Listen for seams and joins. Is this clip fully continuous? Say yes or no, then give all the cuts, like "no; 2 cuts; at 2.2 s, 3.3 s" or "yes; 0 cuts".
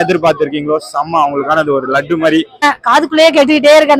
no; 1 cut; at 2.6 s